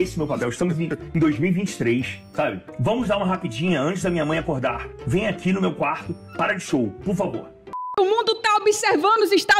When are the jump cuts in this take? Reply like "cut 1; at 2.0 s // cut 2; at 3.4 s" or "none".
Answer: cut 1; at 2.7 s // cut 2; at 4.9 s // cut 3; at 7.8 s